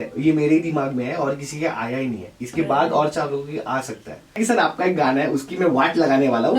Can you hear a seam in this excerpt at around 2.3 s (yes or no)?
no